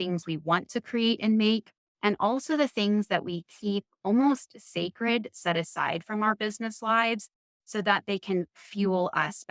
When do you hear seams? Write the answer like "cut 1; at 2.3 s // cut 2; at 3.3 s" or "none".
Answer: none